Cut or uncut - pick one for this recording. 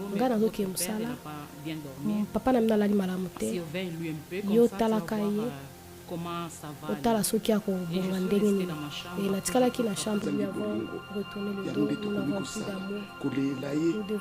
cut